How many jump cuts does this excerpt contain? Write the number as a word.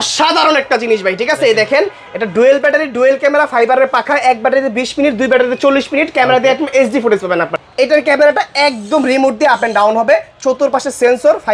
one